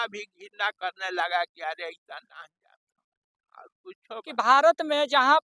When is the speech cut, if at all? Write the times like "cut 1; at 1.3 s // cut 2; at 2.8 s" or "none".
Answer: cut 1; at 4.3 s